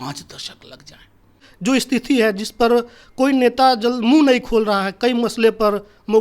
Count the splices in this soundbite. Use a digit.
1